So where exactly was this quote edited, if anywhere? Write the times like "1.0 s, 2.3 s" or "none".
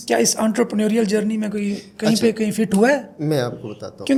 none